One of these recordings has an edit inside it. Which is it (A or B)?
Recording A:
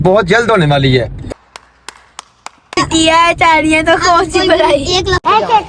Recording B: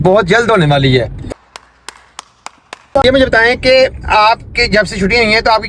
A